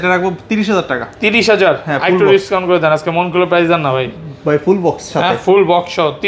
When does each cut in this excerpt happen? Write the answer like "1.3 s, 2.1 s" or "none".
none